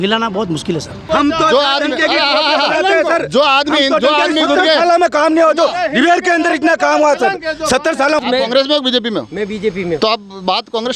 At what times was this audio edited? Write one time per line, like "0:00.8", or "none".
0:01.0
0:08.2

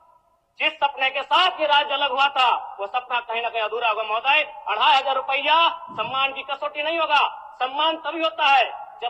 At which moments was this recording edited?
none

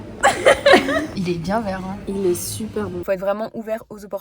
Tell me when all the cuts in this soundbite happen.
0:01.1
0:03.0

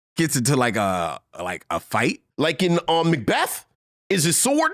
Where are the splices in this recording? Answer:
0:02.2

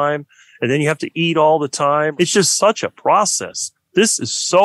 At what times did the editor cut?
0:02.1

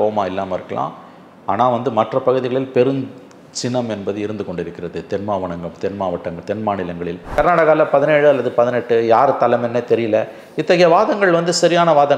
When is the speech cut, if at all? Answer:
0:07.3

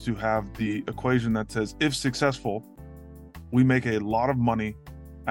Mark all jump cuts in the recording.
none

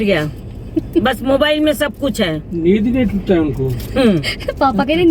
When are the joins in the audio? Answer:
none

